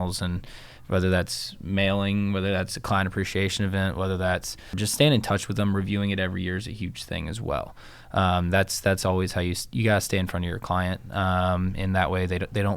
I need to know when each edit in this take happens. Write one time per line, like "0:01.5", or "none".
0:04.8